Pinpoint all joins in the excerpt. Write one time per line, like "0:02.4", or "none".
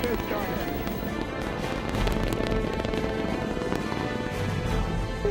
none

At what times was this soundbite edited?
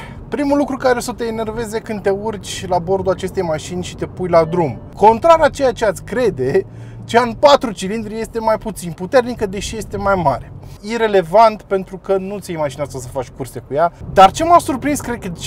0:04.8
0:10.8
0:14.0

